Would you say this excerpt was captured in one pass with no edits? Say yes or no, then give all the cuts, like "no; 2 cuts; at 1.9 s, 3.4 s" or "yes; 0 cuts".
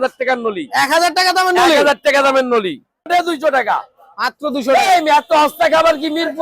no; 1 cut; at 3.1 s